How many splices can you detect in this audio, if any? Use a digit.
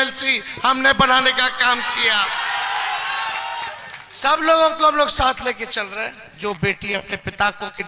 1